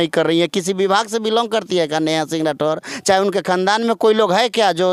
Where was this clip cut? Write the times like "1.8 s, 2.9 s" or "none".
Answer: none